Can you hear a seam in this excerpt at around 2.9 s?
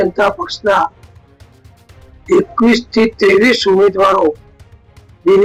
no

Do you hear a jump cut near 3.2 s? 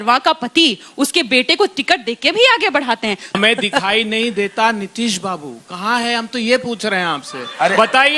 yes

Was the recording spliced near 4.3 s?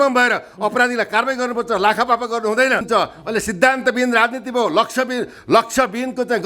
no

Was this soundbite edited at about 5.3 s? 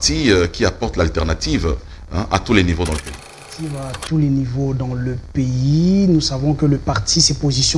no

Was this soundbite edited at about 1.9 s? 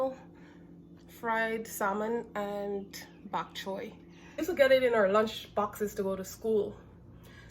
no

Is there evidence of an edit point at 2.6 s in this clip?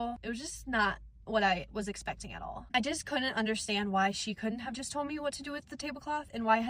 yes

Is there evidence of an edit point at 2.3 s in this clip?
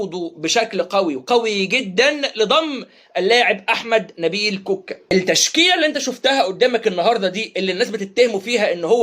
no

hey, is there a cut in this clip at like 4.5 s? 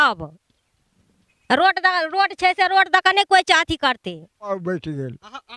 yes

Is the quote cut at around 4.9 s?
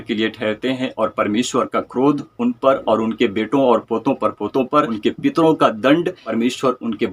yes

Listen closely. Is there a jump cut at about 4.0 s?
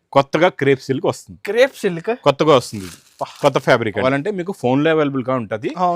yes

